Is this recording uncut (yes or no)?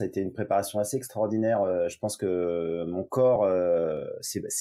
yes